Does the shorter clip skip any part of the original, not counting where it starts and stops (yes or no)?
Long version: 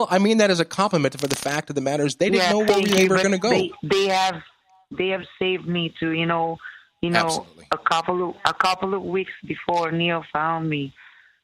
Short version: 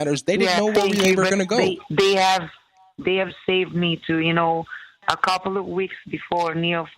yes